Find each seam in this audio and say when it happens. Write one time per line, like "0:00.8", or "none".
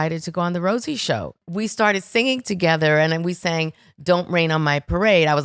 0:01.4